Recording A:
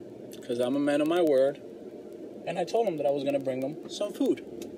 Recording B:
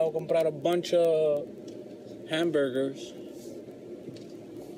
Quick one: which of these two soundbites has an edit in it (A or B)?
A